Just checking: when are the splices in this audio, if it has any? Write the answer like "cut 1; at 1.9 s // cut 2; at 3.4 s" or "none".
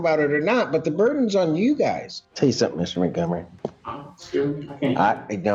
cut 1; at 2.1 s